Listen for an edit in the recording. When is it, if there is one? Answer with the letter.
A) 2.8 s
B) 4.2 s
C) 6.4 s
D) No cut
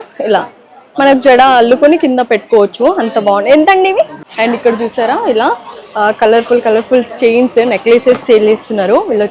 B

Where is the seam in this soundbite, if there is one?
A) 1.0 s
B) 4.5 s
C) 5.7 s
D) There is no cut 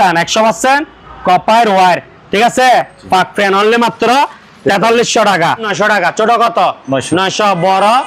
C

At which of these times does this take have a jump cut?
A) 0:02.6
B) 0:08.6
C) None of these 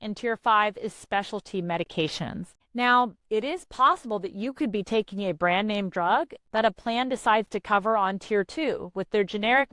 A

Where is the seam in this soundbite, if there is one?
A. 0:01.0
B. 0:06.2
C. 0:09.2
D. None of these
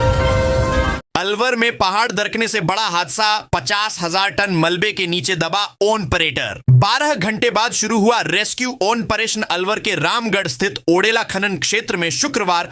A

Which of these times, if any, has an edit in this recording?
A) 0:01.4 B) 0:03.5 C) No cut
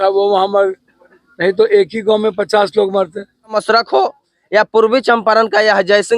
B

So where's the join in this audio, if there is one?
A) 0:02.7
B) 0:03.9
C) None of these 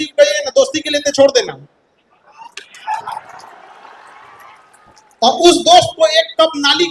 C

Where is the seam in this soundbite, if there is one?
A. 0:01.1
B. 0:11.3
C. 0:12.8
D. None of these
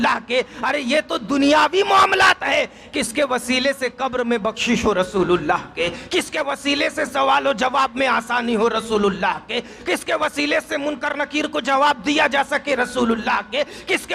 D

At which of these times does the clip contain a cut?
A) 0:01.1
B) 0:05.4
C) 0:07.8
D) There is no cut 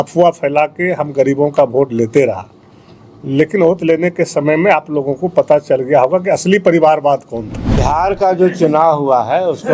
C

